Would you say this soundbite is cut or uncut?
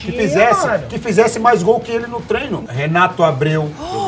cut